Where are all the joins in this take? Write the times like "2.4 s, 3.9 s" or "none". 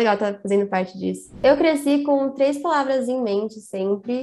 1.3 s